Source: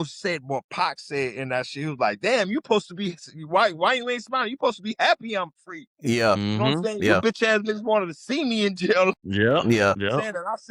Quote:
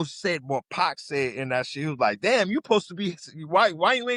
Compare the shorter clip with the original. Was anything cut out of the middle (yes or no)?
no